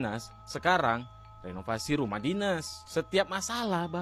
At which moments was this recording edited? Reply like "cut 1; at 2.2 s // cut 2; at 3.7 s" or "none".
none